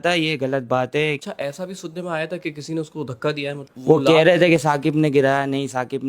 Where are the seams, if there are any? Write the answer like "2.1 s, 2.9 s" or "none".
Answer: 1.2 s, 3.7 s